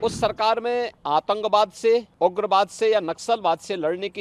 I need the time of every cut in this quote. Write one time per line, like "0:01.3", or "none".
0:01.0
0:02.1